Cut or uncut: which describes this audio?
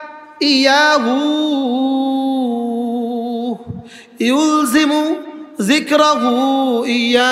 uncut